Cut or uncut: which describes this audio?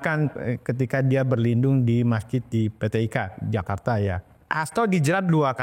cut